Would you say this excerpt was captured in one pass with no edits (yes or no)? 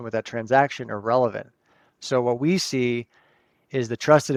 yes